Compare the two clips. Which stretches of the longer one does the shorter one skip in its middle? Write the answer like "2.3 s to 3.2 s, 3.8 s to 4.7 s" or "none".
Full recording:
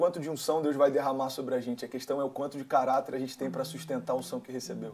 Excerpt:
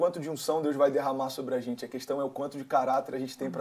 none